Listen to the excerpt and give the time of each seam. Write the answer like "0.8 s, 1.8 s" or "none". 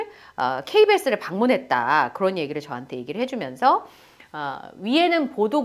none